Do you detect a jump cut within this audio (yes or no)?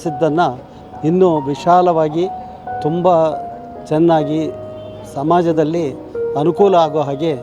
no